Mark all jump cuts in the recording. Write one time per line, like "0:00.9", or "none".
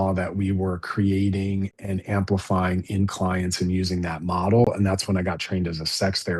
none